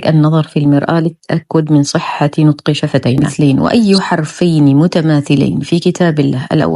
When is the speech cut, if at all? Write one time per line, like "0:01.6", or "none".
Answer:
0:03.3

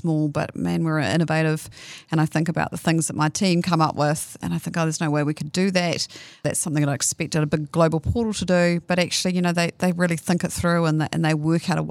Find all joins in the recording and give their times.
0:04.4
0:06.4

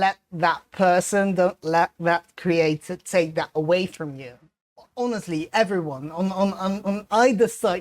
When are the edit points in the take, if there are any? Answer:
0:04.6

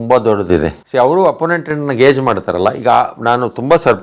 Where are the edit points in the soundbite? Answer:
none

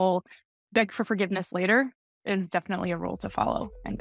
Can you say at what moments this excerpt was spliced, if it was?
none

